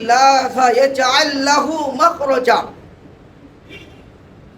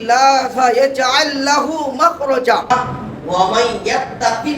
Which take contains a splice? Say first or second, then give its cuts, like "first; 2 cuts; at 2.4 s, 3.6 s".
second; 1 cut; at 2.7 s